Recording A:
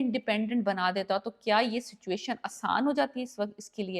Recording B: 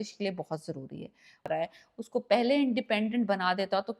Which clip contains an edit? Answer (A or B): B